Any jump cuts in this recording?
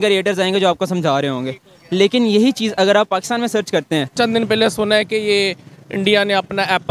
yes; 1 cut; at 4.1 s

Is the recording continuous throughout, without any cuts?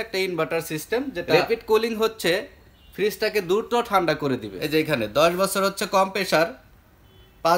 no; 2 cuts; at 1.3 s, 4.5 s

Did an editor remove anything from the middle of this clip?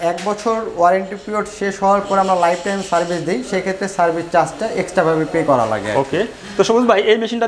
no; 0 cuts

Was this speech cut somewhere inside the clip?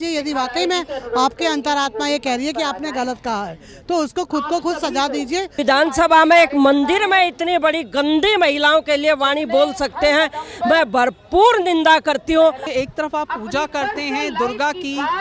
yes; 2 cuts; at 5.6 s, 12.6 s

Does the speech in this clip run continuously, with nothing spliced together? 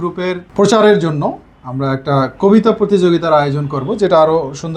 yes; 0 cuts

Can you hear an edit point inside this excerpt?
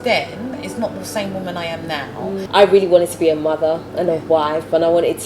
yes; 1 cut; at 2.3 s

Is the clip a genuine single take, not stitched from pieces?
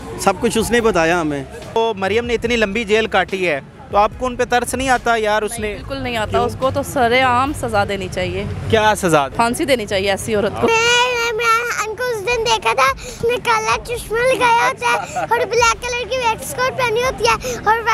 no; 4 cuts; at 1.8 s, 9.3 s, 10.7 s, 13.1 s

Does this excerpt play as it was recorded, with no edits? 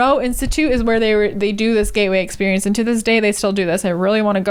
yes; 0 cuts

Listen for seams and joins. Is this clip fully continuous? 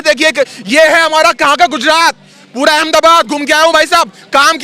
yes; 0 cuts

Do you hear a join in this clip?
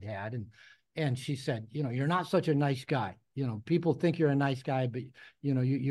no; 0 cuts

